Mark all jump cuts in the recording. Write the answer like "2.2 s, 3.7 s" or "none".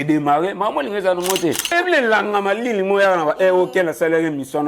1.7 s